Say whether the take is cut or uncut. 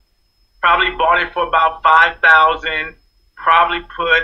uncut